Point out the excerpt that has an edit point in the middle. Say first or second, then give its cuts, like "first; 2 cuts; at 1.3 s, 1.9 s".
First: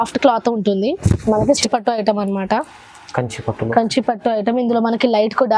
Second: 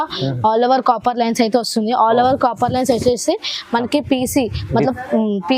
first; 1 cut; at 1.6 s